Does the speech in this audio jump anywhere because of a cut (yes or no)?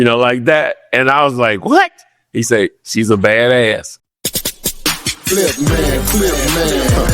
yes